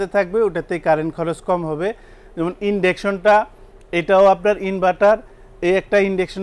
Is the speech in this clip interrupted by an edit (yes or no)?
no